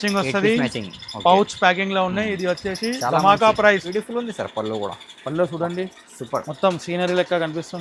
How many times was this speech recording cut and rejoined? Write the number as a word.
one